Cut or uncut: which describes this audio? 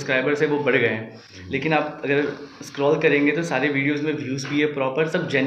uncut